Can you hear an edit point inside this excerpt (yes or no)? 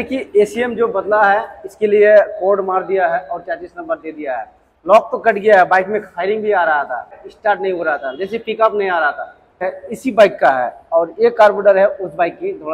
yes